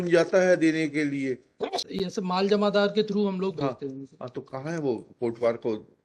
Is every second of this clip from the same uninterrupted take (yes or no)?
no